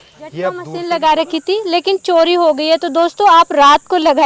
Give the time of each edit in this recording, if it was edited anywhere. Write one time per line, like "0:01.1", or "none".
none